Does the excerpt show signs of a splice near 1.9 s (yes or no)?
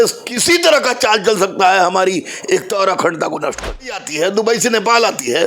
no